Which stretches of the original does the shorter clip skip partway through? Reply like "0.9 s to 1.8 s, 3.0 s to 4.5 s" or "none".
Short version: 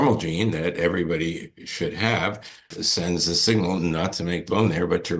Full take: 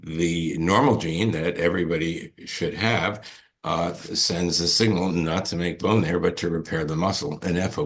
3.5 s to 4.0 s